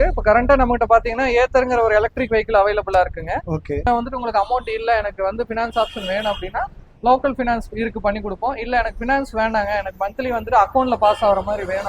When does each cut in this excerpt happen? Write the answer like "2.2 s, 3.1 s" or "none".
3.8 s